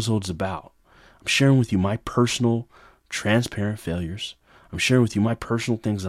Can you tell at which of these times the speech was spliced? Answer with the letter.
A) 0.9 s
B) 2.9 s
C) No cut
C